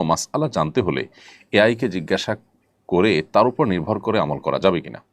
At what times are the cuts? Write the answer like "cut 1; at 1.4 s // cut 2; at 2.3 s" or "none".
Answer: none

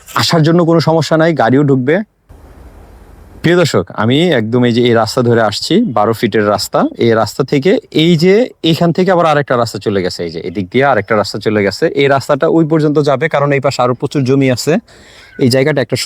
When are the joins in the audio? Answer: cut 1; at 2.5 s

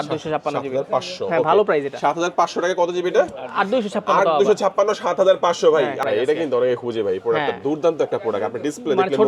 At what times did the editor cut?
cut 1; at 6.0 s

